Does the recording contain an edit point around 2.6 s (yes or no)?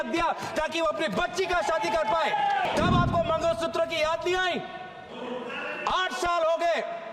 yes